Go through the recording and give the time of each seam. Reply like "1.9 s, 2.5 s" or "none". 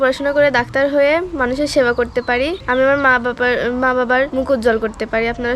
2.6 s, 4.3 s